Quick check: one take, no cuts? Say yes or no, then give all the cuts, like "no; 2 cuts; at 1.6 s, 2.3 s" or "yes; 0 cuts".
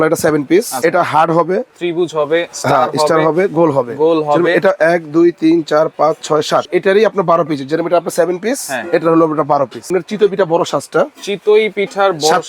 no; 4 cuts; at 0.8 s, 1.7 s, 6.6 s, 9.9 s